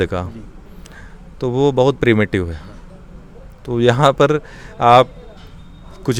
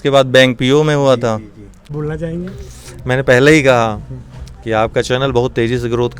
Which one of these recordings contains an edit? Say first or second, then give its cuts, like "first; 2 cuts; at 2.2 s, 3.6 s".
second; 1 cut; at 1.9 s